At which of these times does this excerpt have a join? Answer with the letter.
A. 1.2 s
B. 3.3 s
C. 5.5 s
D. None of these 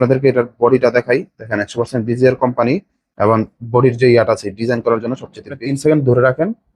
C